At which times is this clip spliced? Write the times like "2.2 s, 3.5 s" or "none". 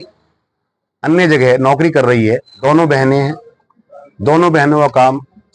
2.5 s